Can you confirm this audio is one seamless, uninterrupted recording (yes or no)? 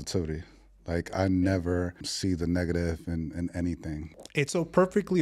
no